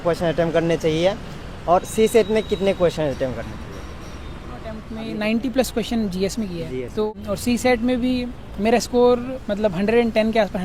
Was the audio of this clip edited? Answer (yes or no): yes